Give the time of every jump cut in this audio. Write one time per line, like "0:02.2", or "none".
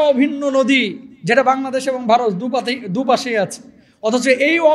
none